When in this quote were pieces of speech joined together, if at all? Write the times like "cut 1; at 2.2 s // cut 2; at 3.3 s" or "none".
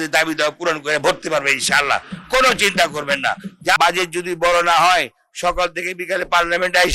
cut 1; at 3.8 s